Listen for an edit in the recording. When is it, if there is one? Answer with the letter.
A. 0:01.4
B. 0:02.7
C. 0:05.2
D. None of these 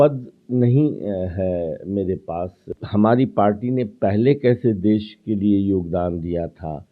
B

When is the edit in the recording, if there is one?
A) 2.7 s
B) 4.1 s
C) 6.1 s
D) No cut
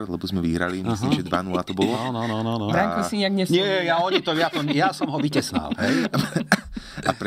D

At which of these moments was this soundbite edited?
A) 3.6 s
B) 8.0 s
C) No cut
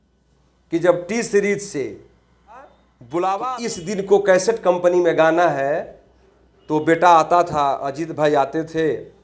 A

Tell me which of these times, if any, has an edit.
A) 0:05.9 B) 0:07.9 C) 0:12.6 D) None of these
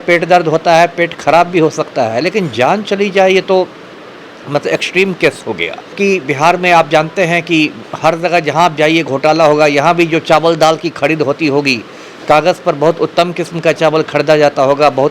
A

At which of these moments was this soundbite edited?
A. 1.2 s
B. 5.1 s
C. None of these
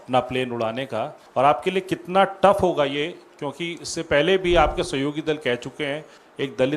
A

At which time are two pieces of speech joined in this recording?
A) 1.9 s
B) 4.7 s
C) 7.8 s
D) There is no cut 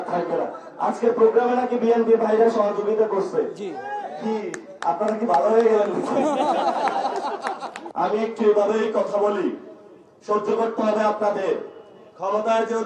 C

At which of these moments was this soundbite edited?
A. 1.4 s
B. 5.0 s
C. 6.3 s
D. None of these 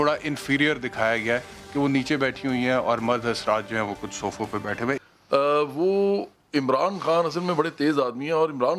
B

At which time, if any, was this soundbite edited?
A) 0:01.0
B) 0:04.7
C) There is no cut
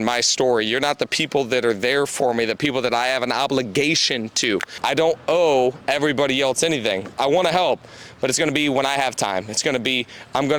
B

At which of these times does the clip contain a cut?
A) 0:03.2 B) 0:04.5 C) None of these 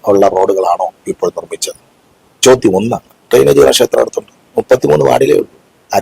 A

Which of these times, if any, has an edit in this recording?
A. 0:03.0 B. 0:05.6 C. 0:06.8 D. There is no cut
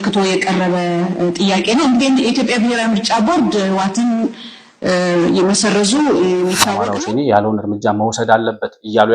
C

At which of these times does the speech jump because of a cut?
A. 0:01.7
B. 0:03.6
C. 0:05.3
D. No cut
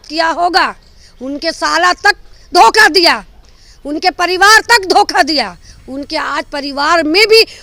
D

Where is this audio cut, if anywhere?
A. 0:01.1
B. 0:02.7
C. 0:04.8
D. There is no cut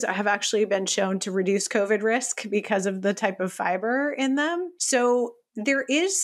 C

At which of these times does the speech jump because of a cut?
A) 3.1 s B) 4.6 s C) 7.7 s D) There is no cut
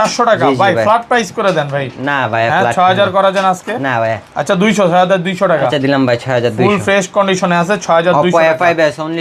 D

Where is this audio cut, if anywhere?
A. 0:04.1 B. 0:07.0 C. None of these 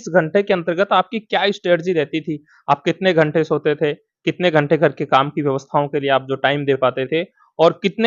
C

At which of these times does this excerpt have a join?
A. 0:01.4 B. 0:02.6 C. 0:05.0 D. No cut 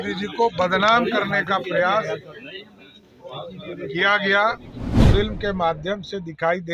C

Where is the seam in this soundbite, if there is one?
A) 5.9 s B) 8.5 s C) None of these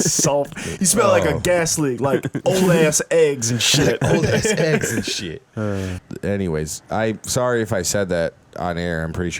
A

